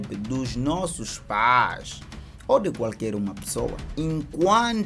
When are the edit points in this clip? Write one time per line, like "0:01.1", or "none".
none